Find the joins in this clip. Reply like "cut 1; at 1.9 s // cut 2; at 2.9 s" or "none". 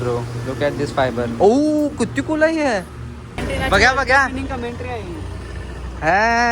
cut 1; at 3.3 s